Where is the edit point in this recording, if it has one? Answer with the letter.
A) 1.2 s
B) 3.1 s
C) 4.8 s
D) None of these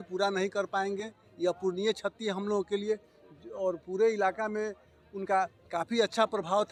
D